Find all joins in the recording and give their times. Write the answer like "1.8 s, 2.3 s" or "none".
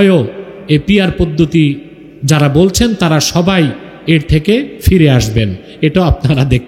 none